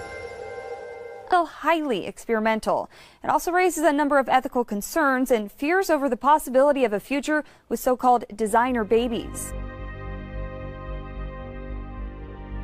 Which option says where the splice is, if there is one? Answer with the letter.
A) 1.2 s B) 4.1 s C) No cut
C